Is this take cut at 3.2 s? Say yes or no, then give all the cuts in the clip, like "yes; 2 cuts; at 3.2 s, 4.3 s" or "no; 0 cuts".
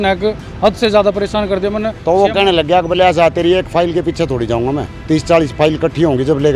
no; 1 cut; at 1.9 s